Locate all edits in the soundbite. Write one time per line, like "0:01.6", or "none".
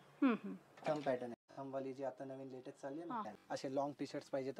0:01.4
0:03.3